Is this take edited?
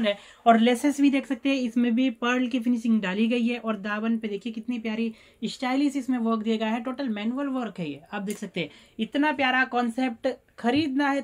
no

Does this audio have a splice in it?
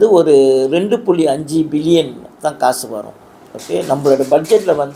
no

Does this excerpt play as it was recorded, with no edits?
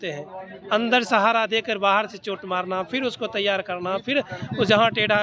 yes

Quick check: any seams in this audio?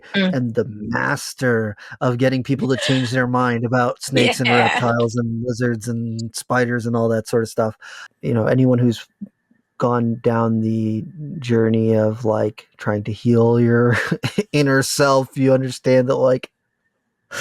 yes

